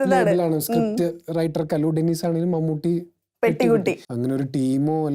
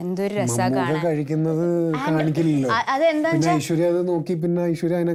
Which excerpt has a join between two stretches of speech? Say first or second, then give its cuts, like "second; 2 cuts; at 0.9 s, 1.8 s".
first; 1 cut; at 4.1 s